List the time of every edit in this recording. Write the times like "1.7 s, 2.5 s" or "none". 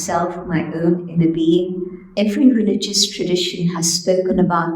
2.0 s